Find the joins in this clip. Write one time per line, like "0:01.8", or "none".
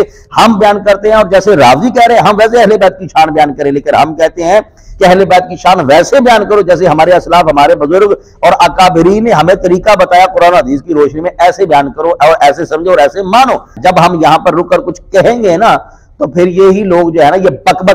0:13.8